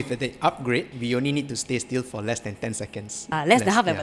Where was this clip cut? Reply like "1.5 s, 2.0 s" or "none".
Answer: 0.9 s, 3.2 s

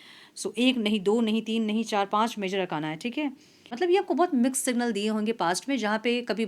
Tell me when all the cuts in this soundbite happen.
3.7 s

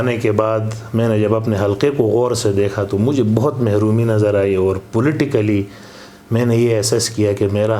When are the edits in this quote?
none

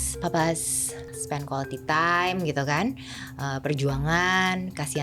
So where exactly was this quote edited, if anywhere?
1.0 s

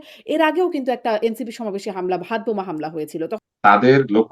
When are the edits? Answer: 3.4 s

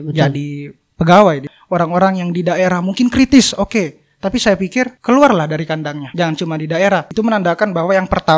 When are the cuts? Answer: 1.5 s, 5.0 s, 6.0 s, 7.1 s

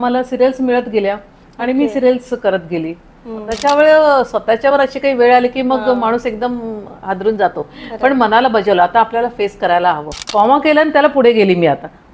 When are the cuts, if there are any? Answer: 3.5 s, 10.1 s

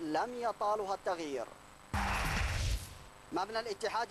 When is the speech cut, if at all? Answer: 1.6 s, 2.8 s

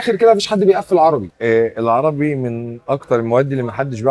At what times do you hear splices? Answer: 1.3 s

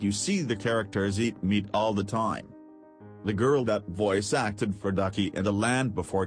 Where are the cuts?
3.1 s

